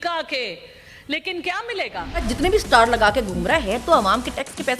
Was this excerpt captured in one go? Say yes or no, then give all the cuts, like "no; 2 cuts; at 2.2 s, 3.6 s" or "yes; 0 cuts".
no; 1 cut; at 2.3 s